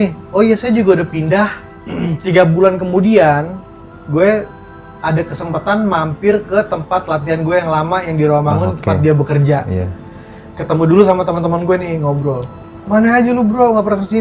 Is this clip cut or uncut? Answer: cut